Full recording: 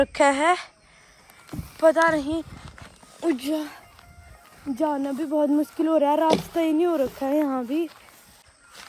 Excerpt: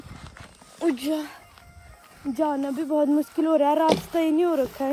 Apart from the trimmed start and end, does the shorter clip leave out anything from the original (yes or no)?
no